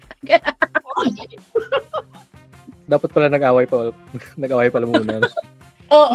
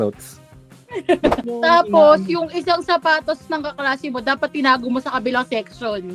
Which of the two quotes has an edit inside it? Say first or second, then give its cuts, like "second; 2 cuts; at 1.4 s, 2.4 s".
second; 1 cut; at 1.4 s